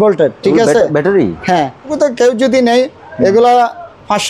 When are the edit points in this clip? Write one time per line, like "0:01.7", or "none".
0:01.9